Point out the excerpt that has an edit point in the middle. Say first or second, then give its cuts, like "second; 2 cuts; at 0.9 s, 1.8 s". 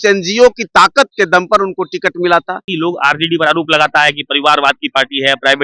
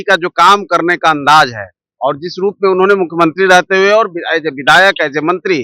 first; 1 cut; at 2.7 s